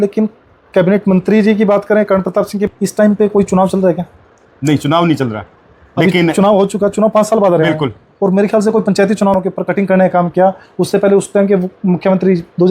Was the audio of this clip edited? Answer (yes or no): yes